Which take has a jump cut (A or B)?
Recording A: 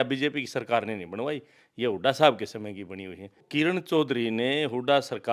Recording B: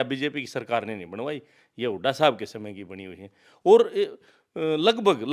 A